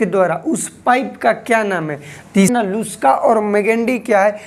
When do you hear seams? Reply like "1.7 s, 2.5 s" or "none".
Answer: 2.5 s

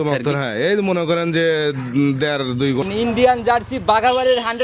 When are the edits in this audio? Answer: 2.9 s

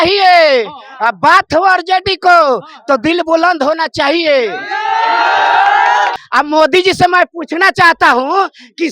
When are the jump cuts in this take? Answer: 6.1 s

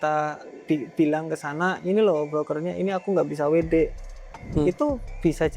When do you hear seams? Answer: none

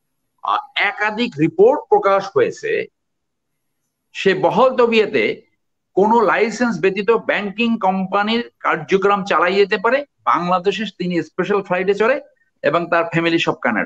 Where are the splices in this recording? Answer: none

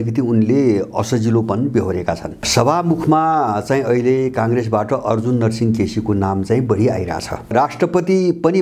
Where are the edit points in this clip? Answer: 2.5 s, 7.5 s

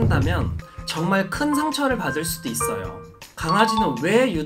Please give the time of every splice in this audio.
3.6 s

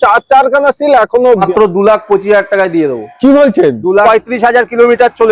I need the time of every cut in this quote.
1.4 s, 4.0 s

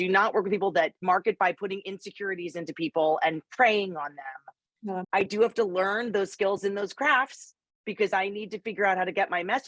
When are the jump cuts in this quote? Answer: 1.0 s, 5.0 s

